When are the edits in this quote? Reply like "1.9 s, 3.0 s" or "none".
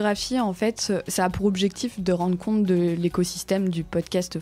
1.1 s